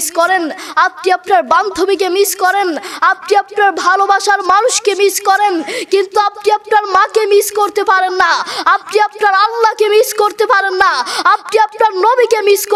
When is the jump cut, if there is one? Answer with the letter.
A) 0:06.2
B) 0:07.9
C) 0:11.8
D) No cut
D